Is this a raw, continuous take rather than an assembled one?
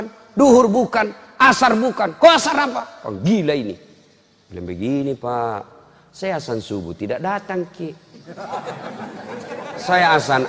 yes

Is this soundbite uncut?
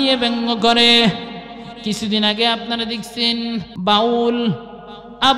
no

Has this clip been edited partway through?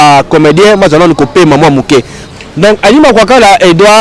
yes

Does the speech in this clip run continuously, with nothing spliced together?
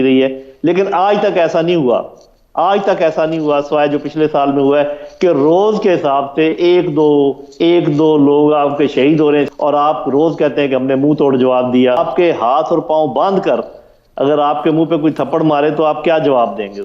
no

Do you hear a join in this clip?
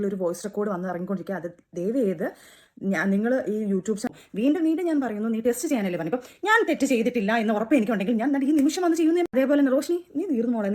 yes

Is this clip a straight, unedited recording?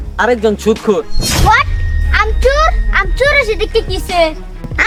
yes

